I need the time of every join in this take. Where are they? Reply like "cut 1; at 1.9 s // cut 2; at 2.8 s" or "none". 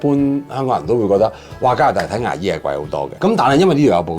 cut 1; at 3.1 s

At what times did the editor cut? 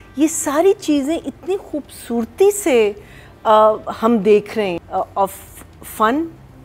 cut 1; at 4.8 s

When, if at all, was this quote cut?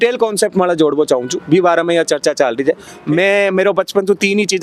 cut 1; at 2.9 s

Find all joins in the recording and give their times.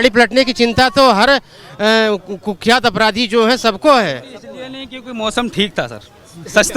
none

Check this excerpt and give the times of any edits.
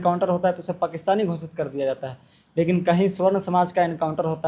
none

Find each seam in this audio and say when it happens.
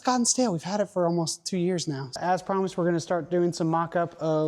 cut 1; at 2.2 s

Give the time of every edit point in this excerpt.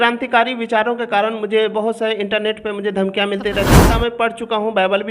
cut 1; at 3.8 s

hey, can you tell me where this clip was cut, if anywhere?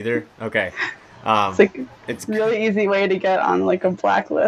none

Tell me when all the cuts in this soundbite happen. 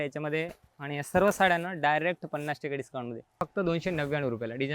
cut 1; at 3.4 s

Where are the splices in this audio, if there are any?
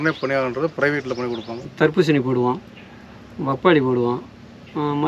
cut 1; at 1.6 s

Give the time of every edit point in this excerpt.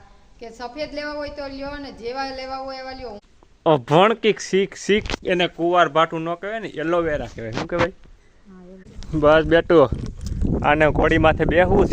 cut 1; at 3.3 s // cut 2; at 9.0 s

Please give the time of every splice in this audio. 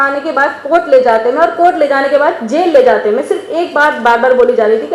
none

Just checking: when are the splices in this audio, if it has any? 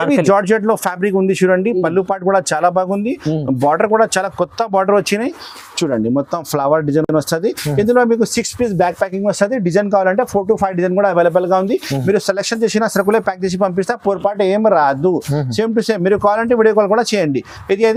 none

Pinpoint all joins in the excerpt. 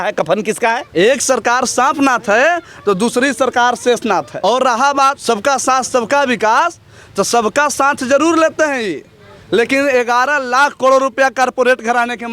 cut 1; at 0.8 s // cut 2; at 4.3 s // cut 3; at 5.2 s

